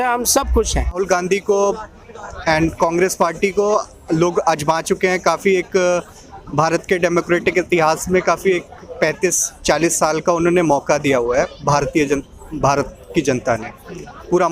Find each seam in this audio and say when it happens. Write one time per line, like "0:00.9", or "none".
0:01.0

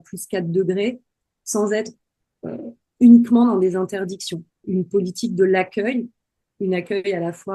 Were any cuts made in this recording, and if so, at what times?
0:04.6

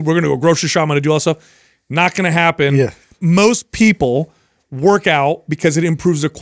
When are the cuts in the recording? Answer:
0:03.1

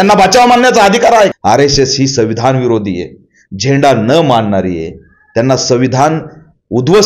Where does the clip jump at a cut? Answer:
0:01.4

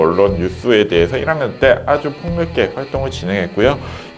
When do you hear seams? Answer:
none

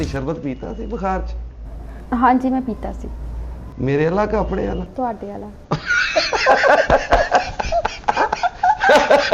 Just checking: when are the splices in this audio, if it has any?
none

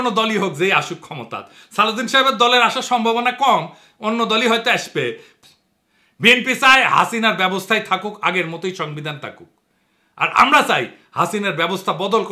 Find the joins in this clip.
0:05.3

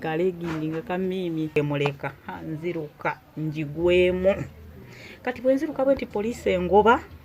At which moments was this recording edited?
0:01.6

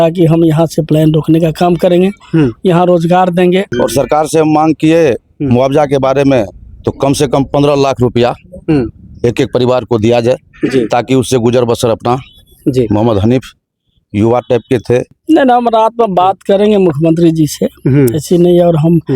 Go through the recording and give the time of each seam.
0:03.7
0:15.1

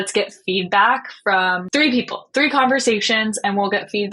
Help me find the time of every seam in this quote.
0:01.6

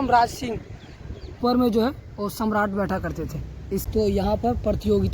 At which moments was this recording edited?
0:01.4
0:03.9

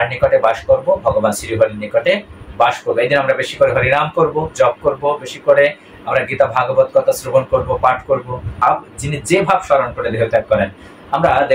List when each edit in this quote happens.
0:08.4

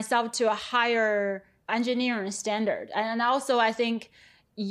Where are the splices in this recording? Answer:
none

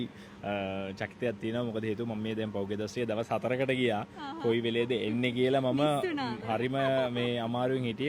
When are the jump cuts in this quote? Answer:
none

